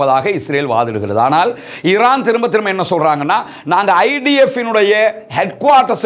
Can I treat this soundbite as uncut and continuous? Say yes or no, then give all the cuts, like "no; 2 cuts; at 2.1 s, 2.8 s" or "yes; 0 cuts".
yes; 0 cuts